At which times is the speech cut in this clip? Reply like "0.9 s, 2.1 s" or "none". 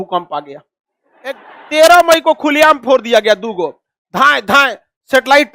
1.5 s